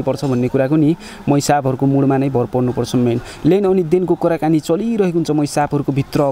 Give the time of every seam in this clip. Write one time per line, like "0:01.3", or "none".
none

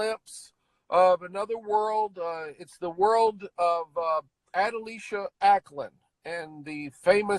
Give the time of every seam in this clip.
0:04.4

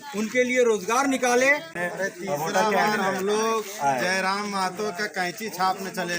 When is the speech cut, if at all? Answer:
0:01.7

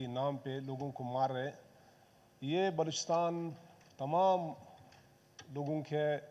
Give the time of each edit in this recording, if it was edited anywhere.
none

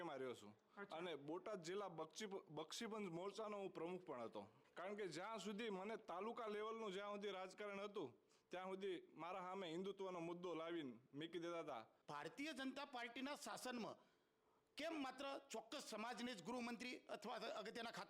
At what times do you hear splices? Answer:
0:04.6
0:12.0

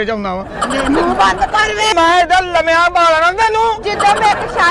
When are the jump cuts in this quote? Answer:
0:01.9

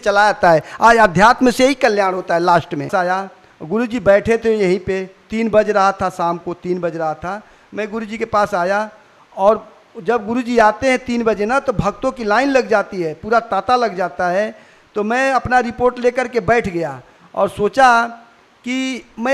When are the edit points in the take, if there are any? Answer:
0:02.9

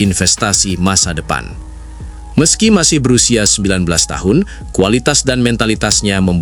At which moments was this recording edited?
none

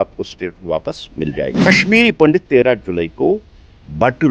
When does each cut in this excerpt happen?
0:01.7

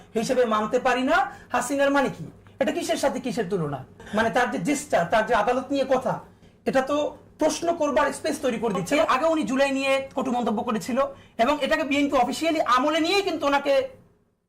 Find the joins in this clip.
0:04.0
0:09.0

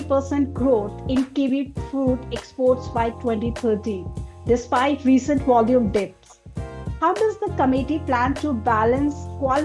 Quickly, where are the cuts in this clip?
none

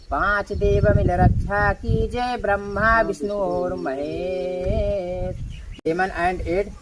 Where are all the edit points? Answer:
0:05.6

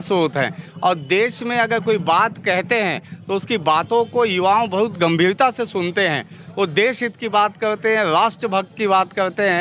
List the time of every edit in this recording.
none

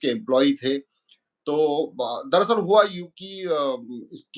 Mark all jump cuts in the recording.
none

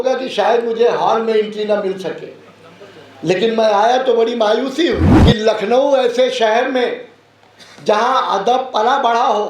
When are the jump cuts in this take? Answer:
0:05.1

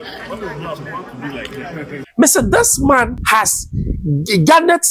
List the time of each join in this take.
0:02.0
0:03.2

